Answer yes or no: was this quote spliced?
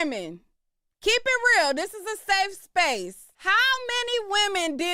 yes